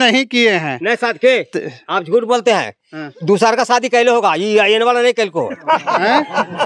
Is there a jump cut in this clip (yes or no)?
no